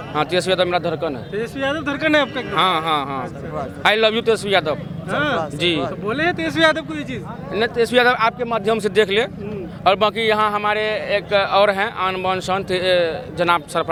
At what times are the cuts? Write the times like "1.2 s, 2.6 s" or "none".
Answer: none

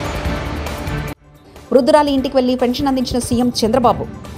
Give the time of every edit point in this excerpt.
none

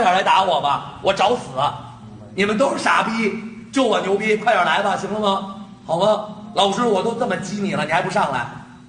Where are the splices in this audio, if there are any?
none

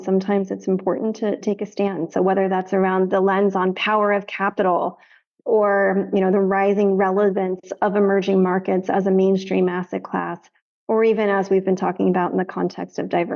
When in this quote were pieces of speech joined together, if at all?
none

